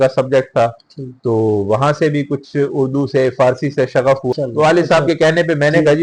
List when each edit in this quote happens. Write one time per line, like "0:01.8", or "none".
0:04.3